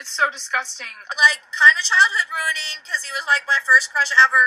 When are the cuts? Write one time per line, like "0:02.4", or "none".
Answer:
0:01.0